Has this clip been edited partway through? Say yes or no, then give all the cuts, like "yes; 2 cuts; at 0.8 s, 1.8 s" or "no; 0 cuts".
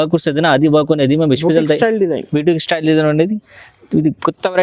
no; 0 cuts